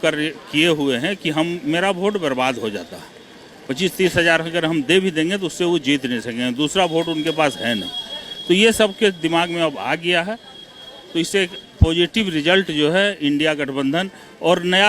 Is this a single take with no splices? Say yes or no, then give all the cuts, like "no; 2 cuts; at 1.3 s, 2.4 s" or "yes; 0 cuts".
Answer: yes; 0 cuts